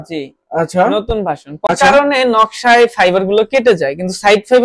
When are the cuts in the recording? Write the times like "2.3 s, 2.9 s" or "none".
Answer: 1.7 s